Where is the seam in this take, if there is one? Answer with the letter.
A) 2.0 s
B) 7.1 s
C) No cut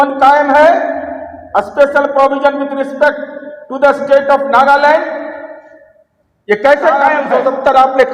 B